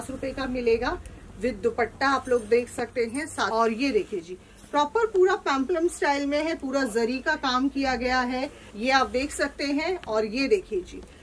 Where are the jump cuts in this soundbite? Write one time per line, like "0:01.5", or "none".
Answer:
0:03.5
0:08.6

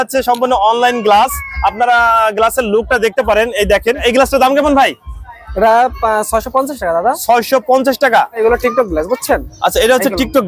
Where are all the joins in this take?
0:04.0
0:08.4

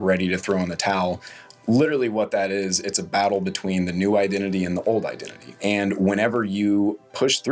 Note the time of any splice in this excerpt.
0:05.4

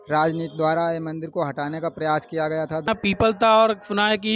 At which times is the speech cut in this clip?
0:02.9

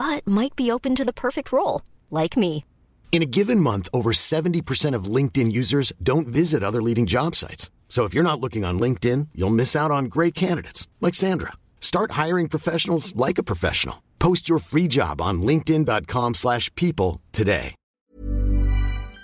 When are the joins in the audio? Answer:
0:18.1

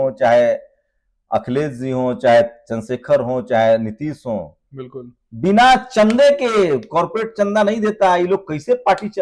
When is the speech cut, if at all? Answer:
none

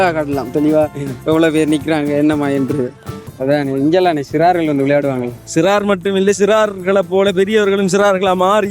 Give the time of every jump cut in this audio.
0:03.3

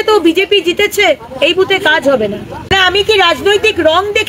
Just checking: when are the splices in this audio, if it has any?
0:02.7

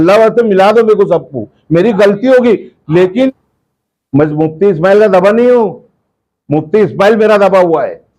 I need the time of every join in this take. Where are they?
0:03.3

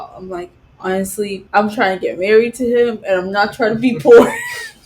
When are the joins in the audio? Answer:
0:01.4

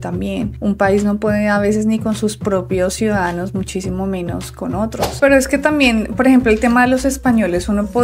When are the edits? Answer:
0:05.2

